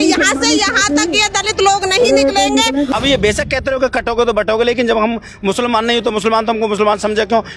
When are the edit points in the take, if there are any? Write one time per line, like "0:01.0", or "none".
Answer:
0:02.9